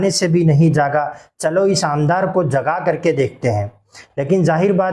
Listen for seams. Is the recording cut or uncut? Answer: uncut